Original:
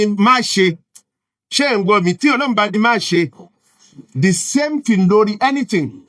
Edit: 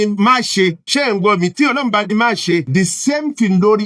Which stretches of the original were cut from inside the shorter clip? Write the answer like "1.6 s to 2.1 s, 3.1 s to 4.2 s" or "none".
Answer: 0.8 s to 1.5 s, 3.3 s to 4.1 s